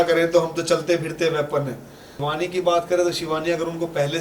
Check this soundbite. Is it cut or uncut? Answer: cut